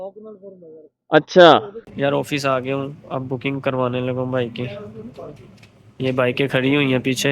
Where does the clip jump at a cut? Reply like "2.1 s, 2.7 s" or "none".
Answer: 1.8 s